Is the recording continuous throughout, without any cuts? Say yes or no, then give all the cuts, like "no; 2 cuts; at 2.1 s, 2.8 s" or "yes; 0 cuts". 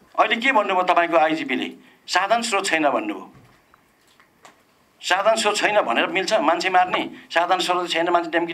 yes; 0 cuts